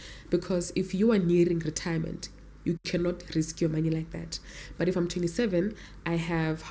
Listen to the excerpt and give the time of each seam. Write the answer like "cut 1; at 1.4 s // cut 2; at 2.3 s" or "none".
none